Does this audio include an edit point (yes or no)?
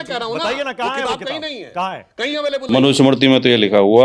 yes